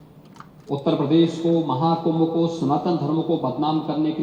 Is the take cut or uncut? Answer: uncut